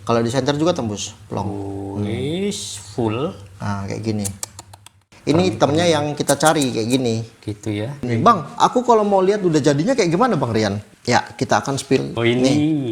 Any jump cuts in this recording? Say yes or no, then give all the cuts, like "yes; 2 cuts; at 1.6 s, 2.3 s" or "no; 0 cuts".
yes; 4 cuts; at 5.0 s, 8.1 s, 10.8 s, 12.1 s